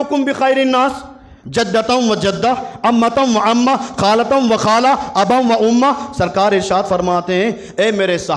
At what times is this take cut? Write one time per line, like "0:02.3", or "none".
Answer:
none

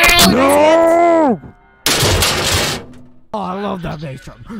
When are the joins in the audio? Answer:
0:03.3

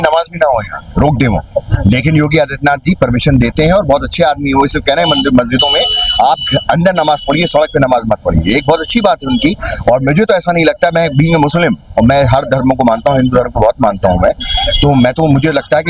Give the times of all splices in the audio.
none

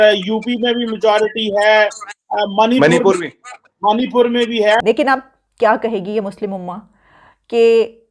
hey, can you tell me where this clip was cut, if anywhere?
0:04.8

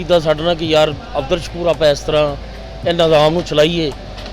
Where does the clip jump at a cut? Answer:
none

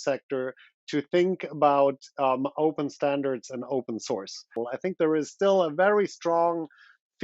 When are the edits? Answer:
0:04.7

